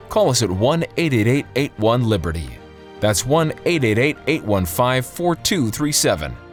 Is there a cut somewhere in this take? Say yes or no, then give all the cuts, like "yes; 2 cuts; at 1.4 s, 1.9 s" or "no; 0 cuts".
no; 0 cuts